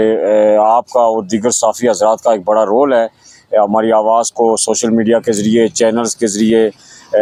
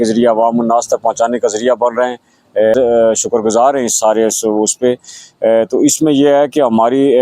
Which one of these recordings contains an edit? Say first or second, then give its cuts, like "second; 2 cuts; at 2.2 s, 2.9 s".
second; 1 cut; at 2.7 s